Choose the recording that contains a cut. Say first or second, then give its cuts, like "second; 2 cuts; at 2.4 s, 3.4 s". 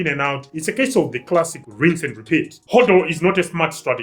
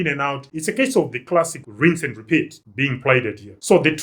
first; 1 cut; at 2.6 s